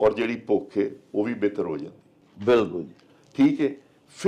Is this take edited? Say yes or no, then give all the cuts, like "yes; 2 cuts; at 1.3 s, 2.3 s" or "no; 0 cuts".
no; 0 cuts